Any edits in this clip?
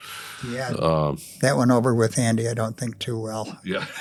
no; 0 cuts

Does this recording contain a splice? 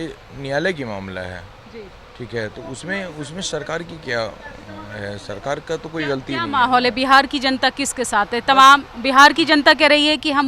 no; 0 cuts

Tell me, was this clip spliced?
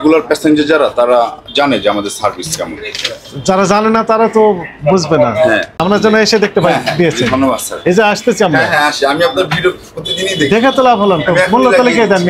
yes; 1 cut; at 5.7 s

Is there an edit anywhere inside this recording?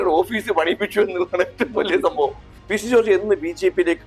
yes; 1 cut; at 2.5 s

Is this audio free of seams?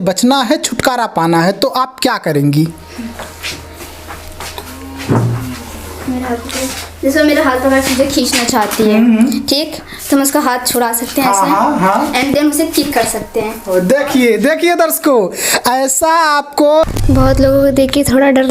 no; 1 cut; at 16.8 s

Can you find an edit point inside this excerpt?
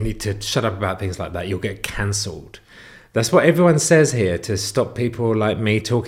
no; 0 cuts

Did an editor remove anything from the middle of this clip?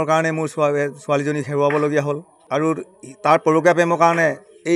yes; 1 cut; at 2.3 s

